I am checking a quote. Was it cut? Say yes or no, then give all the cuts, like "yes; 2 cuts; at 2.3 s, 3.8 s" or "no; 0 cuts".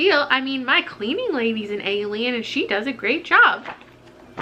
no; 0 cuts